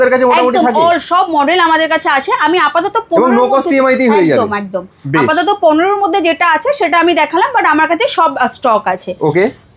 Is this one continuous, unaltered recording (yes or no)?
yes